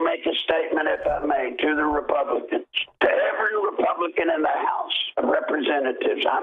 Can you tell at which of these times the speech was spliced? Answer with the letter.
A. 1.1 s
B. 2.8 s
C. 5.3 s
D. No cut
B